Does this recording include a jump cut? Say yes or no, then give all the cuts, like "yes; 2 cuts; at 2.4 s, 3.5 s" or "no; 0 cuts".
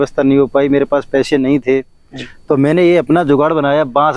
no; 0 cuts